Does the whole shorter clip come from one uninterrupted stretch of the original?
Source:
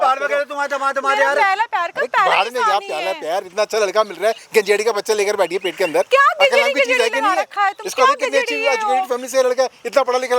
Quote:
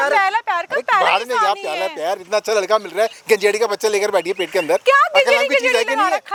yes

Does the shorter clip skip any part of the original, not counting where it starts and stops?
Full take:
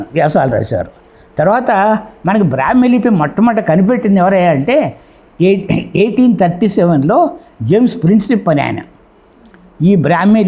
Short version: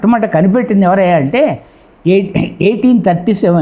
no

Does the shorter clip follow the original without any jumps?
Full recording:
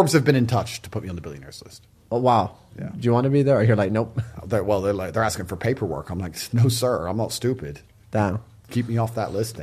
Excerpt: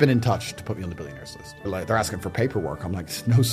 no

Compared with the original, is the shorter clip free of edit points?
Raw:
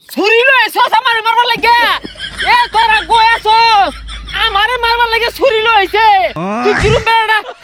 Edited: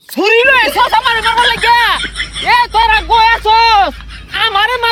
yes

